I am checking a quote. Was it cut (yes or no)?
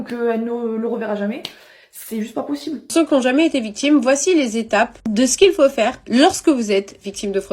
yes